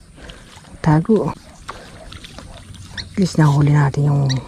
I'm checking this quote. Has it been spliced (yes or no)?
yes